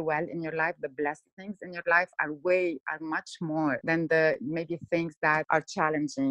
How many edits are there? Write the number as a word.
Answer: two